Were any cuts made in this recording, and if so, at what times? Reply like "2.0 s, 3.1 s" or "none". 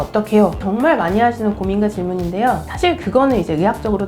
2.6 s